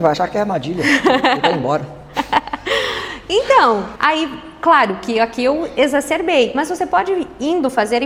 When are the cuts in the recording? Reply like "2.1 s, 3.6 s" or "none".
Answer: none

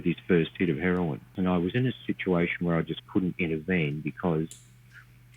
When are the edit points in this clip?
1.3 s

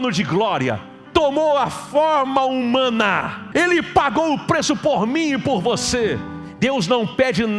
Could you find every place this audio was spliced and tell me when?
0.9 s, 3.4 s, 6.4 s

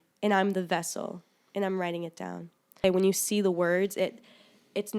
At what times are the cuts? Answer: 2.8 s

